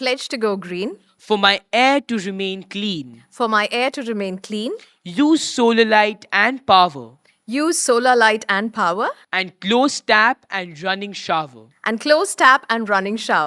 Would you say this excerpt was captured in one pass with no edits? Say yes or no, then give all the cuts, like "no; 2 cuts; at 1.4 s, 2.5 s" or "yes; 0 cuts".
yes; 0 cuts